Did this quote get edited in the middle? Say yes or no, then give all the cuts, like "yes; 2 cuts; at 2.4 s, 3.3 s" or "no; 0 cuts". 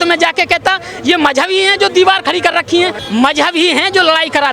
yes; 1 cut; at 3.0 s